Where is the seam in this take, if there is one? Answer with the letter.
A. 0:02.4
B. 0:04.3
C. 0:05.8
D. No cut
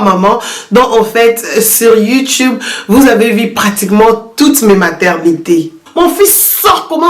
C